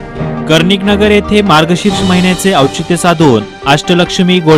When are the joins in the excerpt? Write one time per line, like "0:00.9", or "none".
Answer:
none